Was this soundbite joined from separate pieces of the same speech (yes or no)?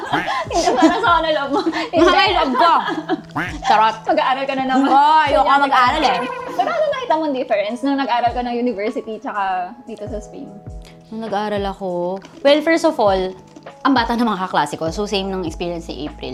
no